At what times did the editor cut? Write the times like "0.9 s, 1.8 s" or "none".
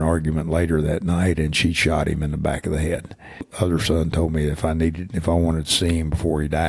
3.5 s